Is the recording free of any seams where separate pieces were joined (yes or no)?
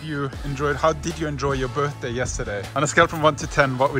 no